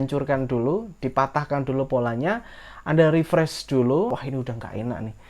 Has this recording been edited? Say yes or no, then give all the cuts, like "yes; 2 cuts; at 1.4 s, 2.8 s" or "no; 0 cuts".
yes; 1 cut; at 4.2 s